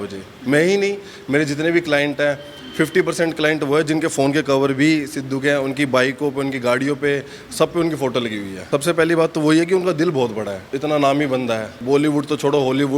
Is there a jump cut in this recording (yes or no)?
yes